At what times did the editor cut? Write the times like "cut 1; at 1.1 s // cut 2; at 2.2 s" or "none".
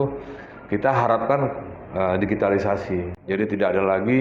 none